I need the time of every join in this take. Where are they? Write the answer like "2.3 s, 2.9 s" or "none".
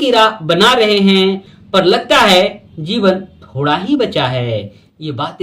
1.5 s